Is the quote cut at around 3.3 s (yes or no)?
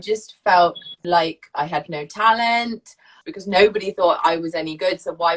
yes